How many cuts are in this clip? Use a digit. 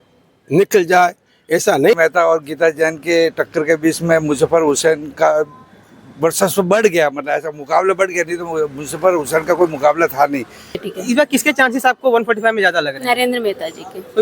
2